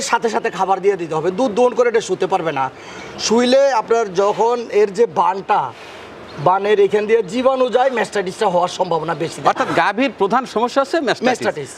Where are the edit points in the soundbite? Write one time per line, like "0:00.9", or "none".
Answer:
none

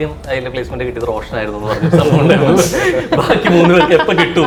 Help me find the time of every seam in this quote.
none

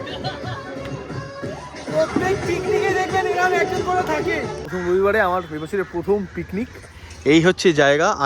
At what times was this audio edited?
0:04.7

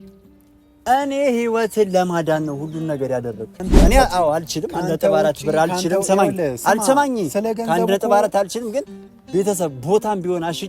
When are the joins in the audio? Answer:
0:03.7

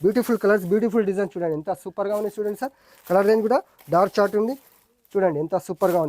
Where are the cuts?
none

